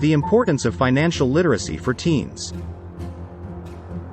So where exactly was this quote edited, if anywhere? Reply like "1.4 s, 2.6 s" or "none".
2.3 s